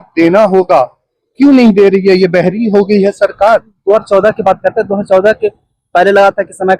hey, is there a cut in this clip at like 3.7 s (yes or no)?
yes